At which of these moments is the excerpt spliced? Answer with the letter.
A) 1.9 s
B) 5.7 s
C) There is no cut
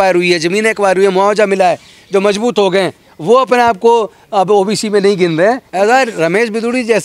B